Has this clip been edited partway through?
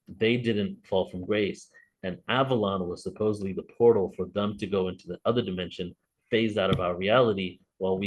no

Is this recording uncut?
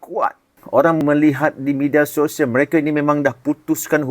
no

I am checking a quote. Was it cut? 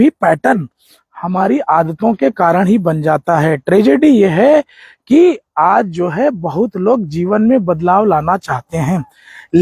no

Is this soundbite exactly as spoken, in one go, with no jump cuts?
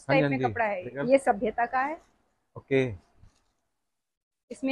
no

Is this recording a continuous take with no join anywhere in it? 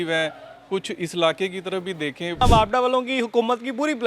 no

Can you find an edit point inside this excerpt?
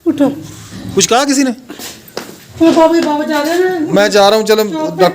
yes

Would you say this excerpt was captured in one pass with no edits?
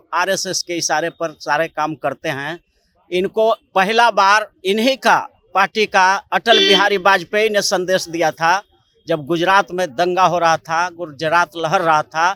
yes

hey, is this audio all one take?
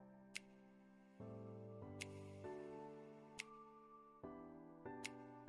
no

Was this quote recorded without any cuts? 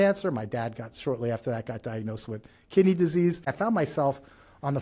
no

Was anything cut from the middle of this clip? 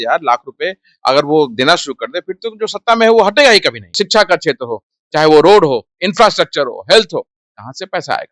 yes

